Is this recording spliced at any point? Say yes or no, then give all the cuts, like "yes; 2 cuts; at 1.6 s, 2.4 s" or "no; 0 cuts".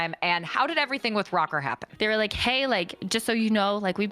yes; 2 cuts; at 1.8 s, 3.0 s